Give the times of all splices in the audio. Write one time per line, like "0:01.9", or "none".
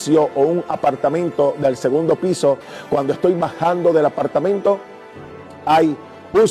0:02.7